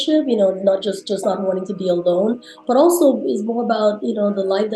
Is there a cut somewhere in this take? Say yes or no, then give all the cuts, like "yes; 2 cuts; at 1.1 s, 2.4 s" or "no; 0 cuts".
no; 0 cuts